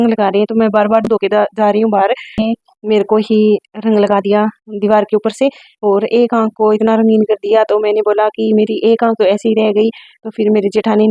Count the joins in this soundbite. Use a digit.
1